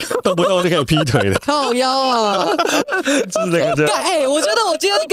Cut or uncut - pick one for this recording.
uncut